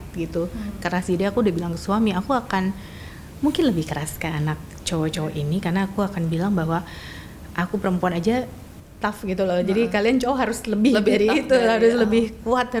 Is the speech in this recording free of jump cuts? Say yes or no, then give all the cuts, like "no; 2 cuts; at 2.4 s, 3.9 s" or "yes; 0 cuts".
yes; 0 cuts